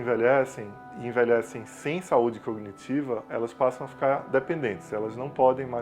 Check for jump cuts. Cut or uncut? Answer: cut